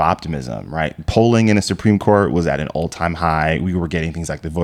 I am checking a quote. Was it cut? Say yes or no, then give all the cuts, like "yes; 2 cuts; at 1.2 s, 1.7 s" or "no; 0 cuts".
no; 0 cuts